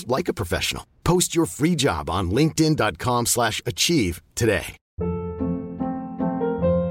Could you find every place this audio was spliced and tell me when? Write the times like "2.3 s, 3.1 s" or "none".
4.8 s